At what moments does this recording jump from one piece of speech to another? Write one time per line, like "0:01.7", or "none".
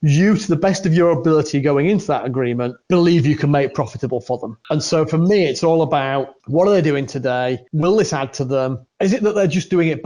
0:02.8
0:04.5
0:06.4
0:07.7
0:08.8

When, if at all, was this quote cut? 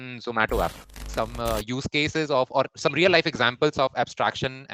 0:01.0

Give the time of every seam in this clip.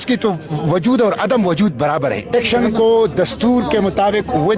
none

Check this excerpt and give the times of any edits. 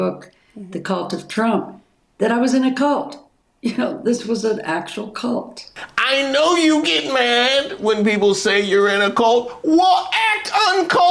0:05.8

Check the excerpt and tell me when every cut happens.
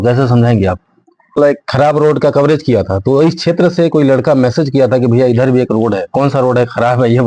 0:01.4

